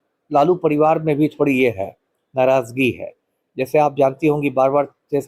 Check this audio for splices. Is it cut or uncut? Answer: uncut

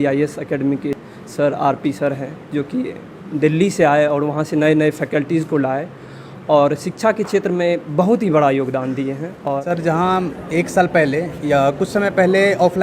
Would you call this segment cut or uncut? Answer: cut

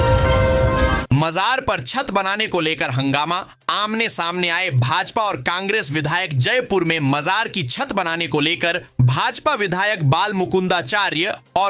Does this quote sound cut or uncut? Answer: cut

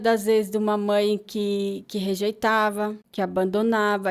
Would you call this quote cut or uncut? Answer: cut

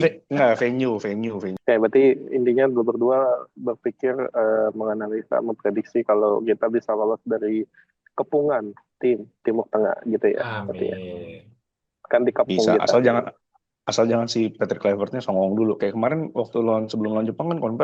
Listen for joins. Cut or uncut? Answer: cut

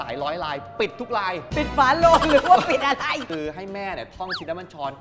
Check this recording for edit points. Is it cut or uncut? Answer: cut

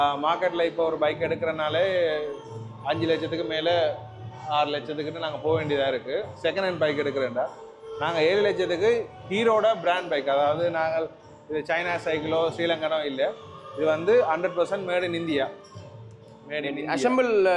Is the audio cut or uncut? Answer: uncut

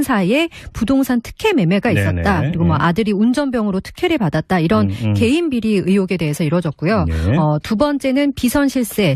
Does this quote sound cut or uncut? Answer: uncut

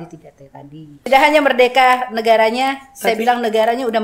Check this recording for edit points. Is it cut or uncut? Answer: cut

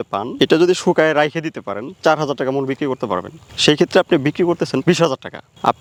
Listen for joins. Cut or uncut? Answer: uncut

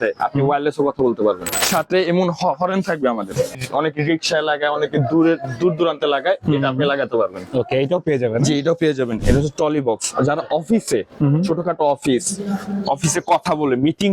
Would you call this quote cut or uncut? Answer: cut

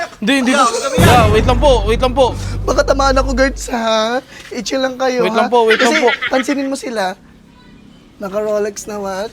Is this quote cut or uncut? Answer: uncut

